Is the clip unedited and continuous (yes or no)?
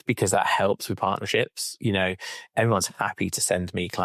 yes